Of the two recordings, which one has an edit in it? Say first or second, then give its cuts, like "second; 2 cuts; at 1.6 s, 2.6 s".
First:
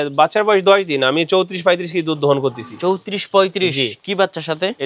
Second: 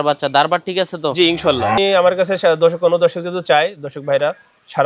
second; 1 cut; at 1.8 s